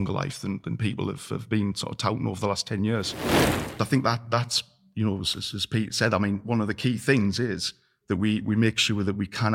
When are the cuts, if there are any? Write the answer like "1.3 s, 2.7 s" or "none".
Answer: 3.1 s, 3.7 s